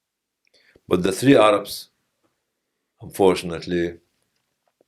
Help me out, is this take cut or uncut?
uncut